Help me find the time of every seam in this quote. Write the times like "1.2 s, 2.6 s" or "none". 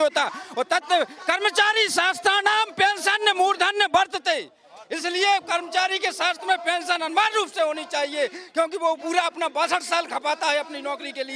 none